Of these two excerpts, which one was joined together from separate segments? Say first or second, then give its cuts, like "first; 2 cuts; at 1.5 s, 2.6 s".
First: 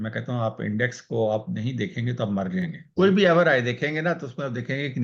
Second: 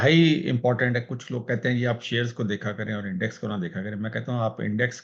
first; 1 cut; at 2.8 s